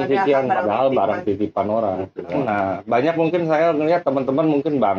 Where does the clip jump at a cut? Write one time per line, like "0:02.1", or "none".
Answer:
0:02.4